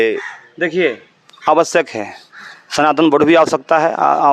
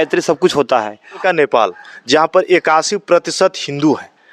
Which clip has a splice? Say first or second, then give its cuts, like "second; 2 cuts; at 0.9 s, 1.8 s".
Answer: second; 1 cut; at 1.2 s